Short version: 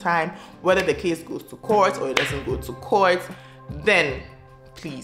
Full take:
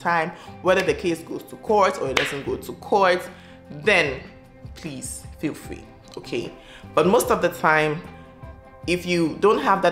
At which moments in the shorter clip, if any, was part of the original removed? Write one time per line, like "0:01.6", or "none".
none